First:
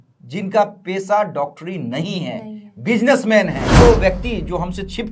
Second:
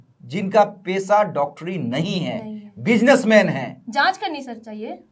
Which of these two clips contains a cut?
first; 1 cut; at 3.8 s

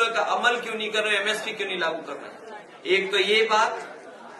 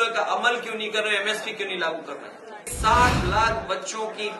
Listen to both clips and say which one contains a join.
second; 1 cut; at 2.7 s

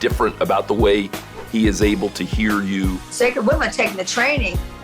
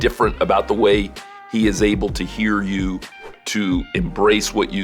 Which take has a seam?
first; 1 cut; at 3.1 s

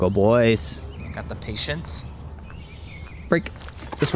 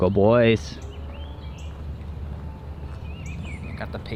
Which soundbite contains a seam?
first; 2 cuts; at 0.9 s, 2.3 s

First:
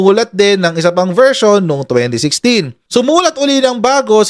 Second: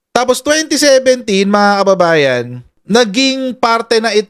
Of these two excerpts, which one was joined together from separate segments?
first; 1 cut; at 2.8 s

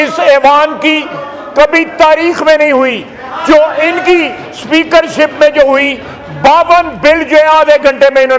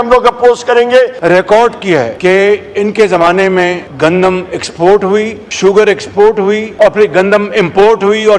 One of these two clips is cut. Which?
second; 5 cuts; at 1.2 s, 2.1 s, 3.8 s, 5.4 s, 6.7 s

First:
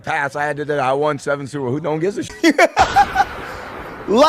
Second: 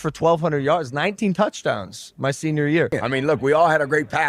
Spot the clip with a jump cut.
second; 1 cut; at 2.9 s

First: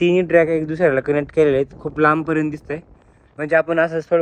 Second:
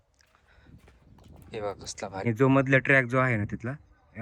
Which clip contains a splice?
second; 1 cut; at 2.2 s

